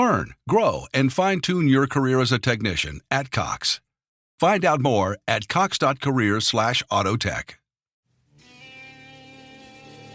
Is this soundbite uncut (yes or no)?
no